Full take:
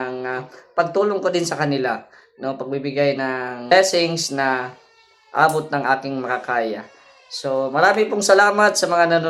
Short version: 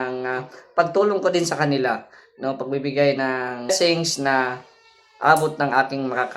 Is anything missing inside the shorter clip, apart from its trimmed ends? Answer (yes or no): yes